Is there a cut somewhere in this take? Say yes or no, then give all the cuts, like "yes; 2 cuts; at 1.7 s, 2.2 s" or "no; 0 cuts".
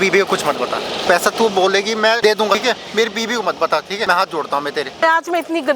yes; 4 cuts; at 1.0 s, 2.6 s, 4.0 s, 5.0 s